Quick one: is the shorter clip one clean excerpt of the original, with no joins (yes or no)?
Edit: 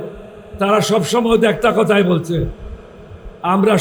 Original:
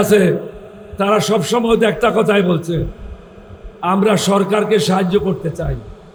yes